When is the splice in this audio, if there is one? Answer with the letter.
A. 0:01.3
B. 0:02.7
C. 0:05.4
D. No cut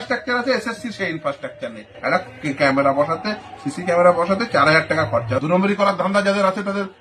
C